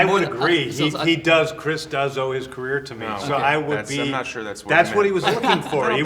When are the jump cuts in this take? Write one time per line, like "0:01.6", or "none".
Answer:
none